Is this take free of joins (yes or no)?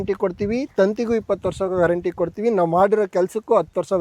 yes